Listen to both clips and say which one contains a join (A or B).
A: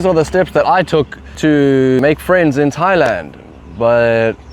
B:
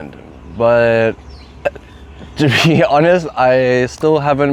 A